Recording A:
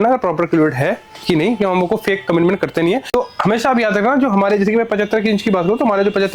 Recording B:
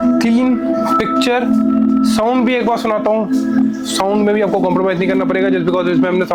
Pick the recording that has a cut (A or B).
A